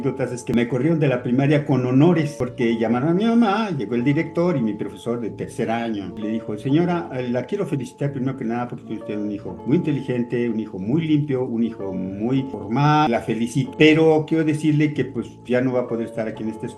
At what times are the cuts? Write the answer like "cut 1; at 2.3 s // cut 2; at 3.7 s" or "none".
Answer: none